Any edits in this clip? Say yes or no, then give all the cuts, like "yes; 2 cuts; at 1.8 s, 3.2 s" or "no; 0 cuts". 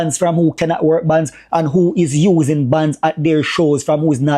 no; 0 cuts